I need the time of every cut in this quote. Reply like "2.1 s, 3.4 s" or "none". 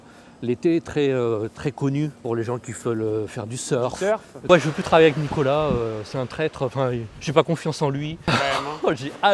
2.2 s, 4.5 s, 8.3 s